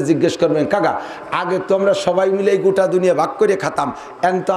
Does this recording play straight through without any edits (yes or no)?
yes